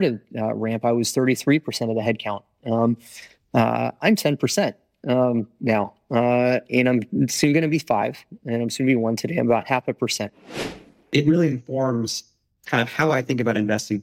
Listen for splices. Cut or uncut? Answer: cut